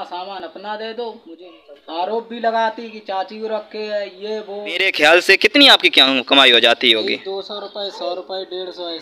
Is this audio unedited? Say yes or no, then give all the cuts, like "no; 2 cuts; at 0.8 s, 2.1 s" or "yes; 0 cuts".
no; 2 cuts; at 1.3 s, 4.9 s